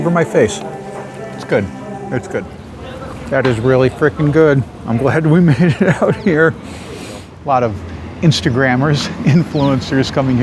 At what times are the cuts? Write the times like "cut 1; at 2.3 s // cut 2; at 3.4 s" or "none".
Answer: cut 1; at 2.5 s // cut 2; at 7.3 s

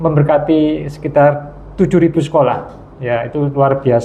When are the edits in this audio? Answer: none

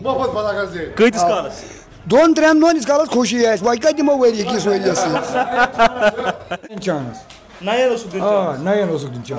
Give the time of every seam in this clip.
cut 1; at 6.8 s

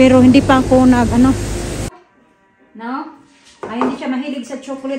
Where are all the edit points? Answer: cut 1; at 1.9 s

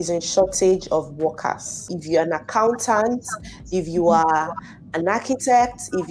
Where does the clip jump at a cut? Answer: cut 1; at 1.9 s

